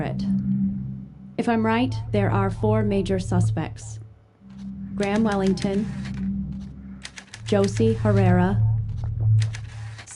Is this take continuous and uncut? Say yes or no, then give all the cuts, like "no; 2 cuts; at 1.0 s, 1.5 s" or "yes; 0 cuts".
yes; 0 cuts